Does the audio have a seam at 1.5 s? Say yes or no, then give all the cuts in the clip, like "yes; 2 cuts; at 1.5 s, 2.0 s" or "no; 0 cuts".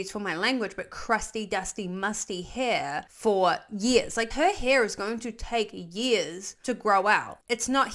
no; 2 cuts; at 3.1 s, 4.3 s